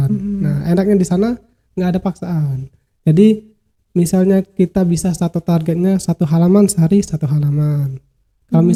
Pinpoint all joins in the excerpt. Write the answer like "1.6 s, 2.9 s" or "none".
none